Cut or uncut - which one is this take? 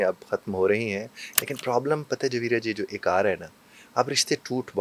uncut